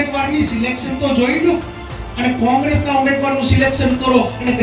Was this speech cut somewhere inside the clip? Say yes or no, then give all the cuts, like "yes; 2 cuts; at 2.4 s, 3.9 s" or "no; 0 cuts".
no; 0 cuts